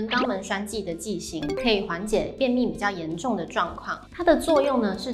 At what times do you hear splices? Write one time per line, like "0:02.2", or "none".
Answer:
none